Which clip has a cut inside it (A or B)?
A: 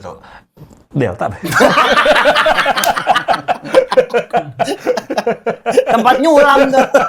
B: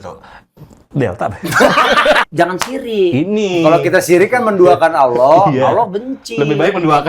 B